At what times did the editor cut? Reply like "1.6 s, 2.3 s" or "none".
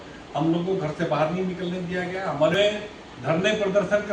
2.5 s

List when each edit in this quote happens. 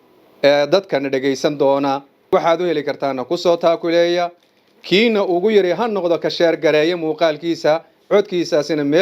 2.1 s

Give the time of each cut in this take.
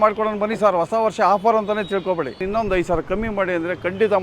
2.4 s

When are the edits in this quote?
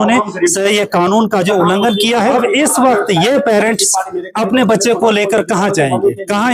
2.3 s

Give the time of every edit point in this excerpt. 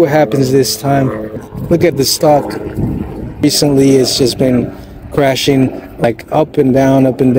1.5 s, 3.4 s, 6.0 s

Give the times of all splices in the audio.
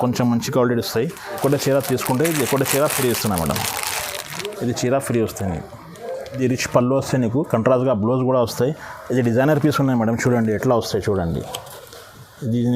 1.4 s, 6.3 s

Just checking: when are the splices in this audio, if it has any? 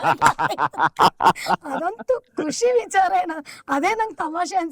none

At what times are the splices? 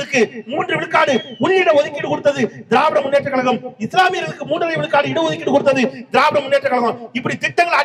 none

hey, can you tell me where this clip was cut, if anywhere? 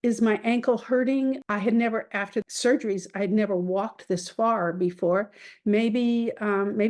1.4 s, 2.5 s

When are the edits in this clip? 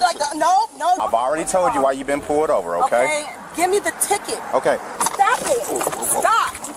1.0 s, 4.9 s

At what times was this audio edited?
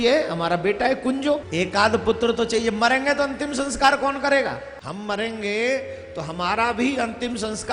1.5 s, 4.8 s

